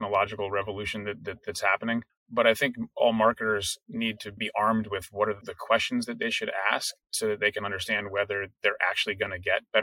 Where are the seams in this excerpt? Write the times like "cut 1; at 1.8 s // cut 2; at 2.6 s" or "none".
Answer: cut 1; at 2.2 s // cut 2; at 4.4 s // cut 3; at 5.5 s